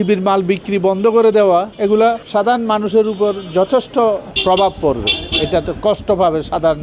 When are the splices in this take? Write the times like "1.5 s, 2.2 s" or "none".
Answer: 1.8 s, 4.3 s

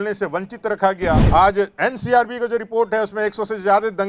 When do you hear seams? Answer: 1.2 s

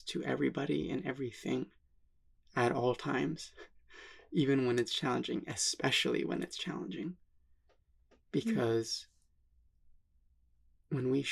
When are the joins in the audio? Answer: none

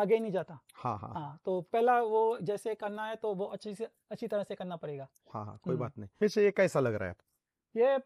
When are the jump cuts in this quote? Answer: 6.1 s

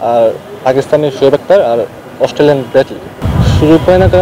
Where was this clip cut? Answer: 3.1 s

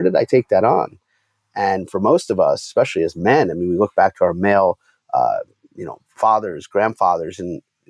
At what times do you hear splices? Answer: none

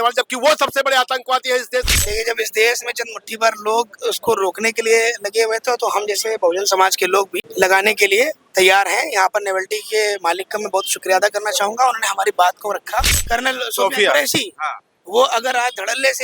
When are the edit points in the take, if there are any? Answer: 1.9 s, 7.4 s, 13.1 s

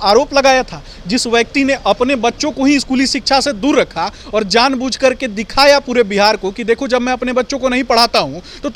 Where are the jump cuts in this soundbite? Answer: none

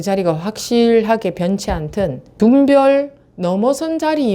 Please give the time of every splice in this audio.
2.2 s

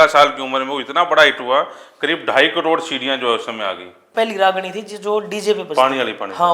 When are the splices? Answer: 4.1 s

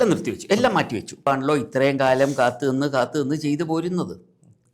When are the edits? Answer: 1.3 s

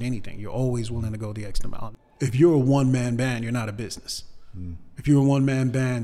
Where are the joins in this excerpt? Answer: 1.9 s

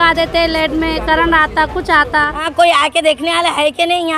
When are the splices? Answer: 2.4 s

